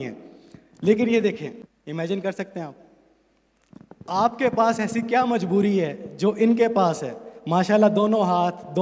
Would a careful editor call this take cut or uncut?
cut